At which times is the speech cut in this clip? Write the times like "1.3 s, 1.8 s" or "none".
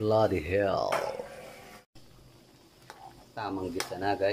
1.8 s